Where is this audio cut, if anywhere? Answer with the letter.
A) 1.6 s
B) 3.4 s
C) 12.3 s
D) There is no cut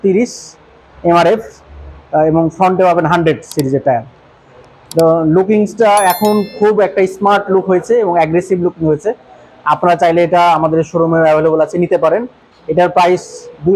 D